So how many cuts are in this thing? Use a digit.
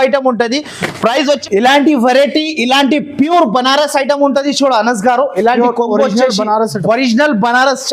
1